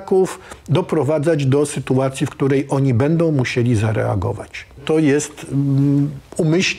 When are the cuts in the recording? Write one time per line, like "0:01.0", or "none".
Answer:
0:04.8

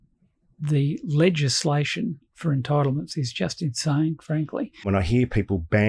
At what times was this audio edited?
0:04.9

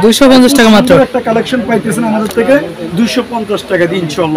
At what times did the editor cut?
none

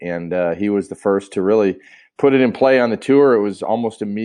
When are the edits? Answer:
none

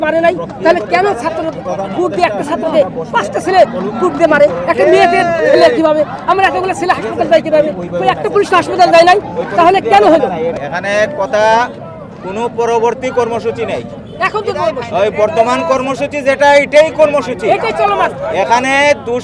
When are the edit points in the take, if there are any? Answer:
0:10.6

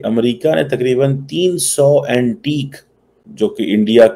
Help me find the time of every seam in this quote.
0:03.0

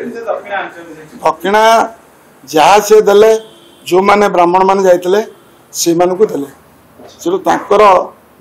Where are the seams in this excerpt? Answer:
none

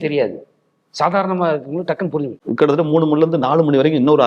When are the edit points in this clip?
0:02.4

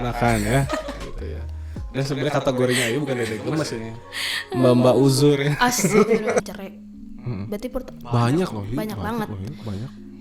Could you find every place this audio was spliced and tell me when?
0:06.4

